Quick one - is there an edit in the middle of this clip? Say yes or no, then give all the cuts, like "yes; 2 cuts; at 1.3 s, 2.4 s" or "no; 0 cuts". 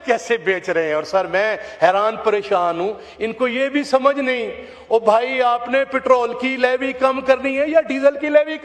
no; 0 cuts